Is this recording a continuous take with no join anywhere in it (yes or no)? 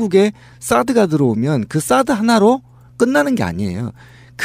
yes